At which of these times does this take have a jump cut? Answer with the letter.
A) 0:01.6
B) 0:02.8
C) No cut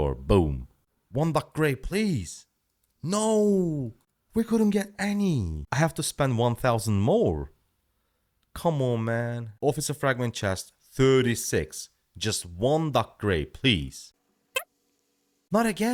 C